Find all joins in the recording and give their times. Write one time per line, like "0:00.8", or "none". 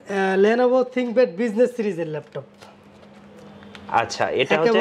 none